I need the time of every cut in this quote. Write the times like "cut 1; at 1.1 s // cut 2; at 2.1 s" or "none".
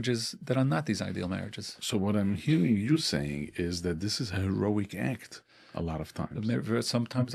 none